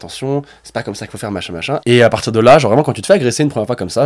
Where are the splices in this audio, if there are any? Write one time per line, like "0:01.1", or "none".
0:01.8